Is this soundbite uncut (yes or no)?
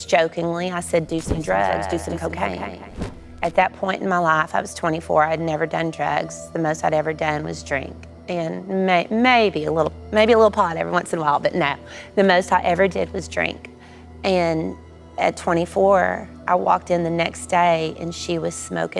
yes